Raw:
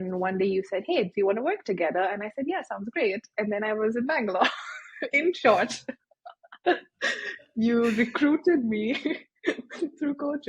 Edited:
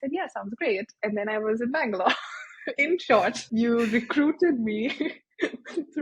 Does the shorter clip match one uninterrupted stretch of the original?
no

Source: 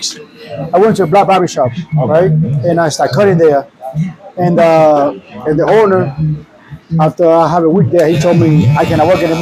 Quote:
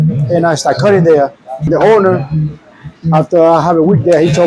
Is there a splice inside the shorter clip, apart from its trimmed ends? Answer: yes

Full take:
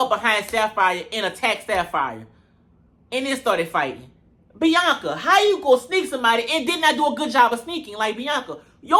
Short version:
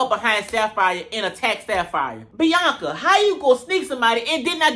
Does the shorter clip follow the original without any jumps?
no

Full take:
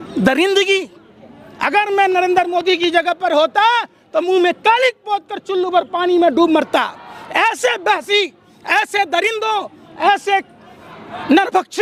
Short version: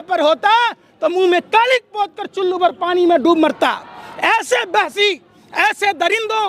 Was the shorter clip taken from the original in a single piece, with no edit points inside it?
yes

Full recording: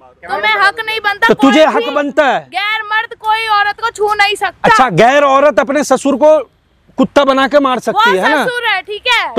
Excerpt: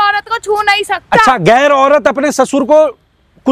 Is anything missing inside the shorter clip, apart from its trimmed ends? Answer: no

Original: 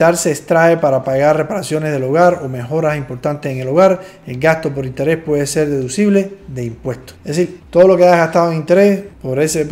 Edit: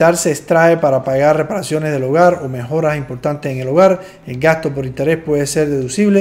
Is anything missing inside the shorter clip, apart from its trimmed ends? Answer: no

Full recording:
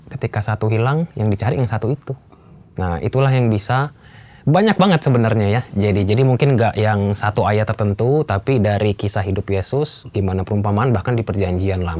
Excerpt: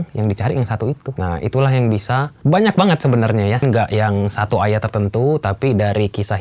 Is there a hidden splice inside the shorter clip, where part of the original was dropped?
yes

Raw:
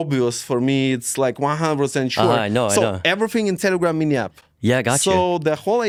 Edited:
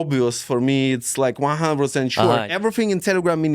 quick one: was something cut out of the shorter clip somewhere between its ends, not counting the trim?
yes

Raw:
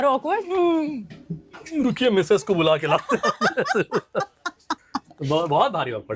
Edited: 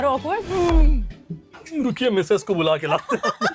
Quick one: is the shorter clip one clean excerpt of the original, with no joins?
yes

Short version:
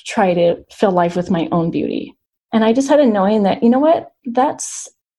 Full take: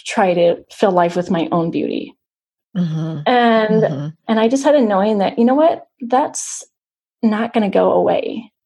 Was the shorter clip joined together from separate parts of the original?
yes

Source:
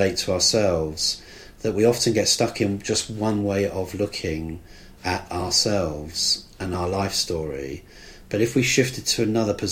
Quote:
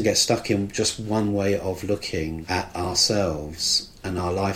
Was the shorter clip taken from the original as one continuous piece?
no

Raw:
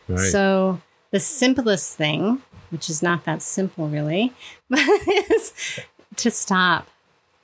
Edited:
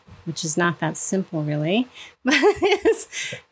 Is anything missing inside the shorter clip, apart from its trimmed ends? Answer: no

